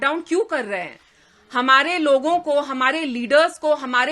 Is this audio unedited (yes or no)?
yes